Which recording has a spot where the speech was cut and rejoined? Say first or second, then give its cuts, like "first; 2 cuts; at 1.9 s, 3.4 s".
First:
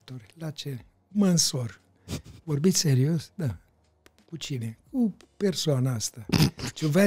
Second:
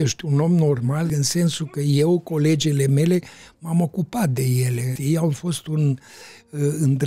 second; 2 cuts; at 1.1 s, 4.9 s